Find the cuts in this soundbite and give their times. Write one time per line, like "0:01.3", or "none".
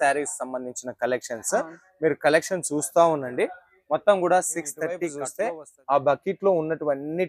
0:05.2